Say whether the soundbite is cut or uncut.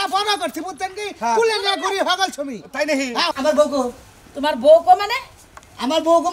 cut